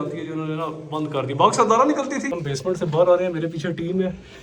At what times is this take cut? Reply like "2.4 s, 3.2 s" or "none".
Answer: 2.3 s